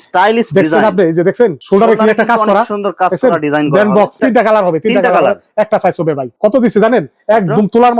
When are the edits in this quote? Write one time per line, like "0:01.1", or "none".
none